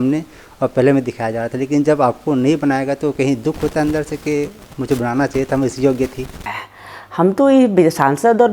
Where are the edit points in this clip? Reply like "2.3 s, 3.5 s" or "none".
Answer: 6.5 s